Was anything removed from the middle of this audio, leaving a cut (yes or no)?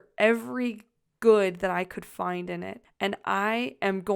yes